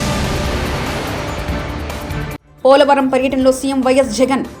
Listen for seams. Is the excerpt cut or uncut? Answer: uncut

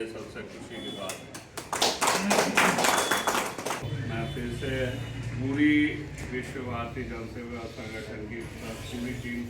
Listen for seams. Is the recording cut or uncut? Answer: cut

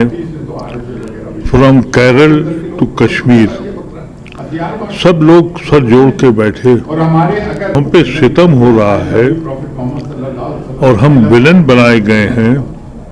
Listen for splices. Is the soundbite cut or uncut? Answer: cut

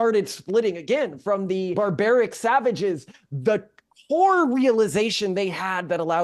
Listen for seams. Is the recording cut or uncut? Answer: cut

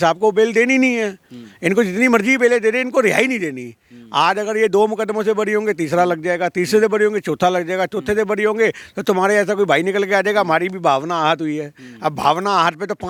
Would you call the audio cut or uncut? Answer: uncut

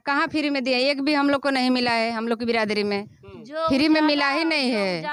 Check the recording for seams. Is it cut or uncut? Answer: uncut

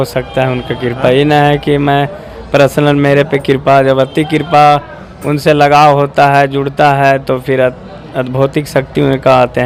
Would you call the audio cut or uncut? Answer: uncut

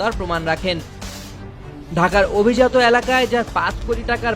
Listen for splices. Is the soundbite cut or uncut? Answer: cut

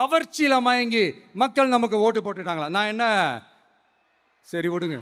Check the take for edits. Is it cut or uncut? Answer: uncut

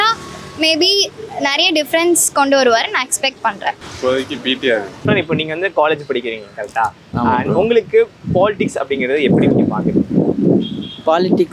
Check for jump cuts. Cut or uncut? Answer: uncut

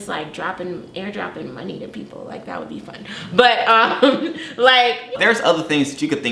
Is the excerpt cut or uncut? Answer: cut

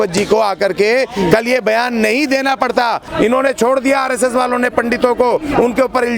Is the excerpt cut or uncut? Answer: cut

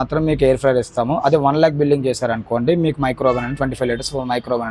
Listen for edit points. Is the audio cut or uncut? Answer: uncut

